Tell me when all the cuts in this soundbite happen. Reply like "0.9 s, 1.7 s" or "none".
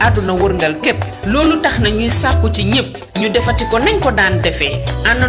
none

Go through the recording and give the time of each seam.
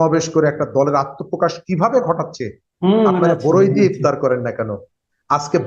2.7 s

